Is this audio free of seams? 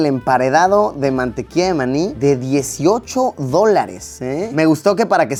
yes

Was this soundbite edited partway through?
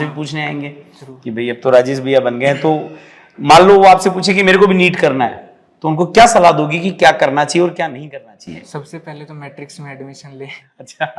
no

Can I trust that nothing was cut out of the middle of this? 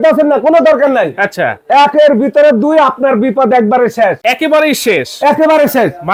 yes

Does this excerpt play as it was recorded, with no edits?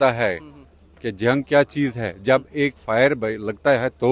yes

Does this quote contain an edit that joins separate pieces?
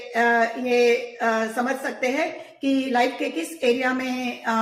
no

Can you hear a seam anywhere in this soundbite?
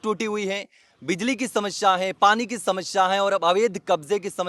no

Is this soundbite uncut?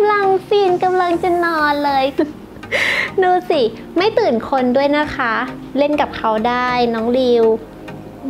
no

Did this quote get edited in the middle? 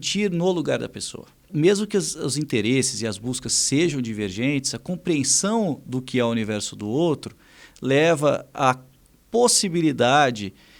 yes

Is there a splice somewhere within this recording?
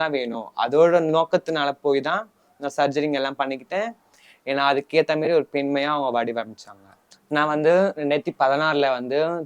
no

